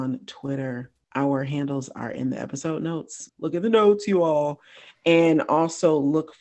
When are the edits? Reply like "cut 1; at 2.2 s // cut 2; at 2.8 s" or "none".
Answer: cut 1; at 3.2 s